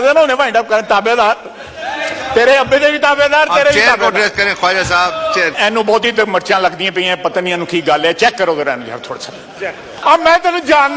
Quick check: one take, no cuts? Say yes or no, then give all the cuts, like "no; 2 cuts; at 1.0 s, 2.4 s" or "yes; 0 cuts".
no; 2 cuts; at 5.6 s, 9.9 s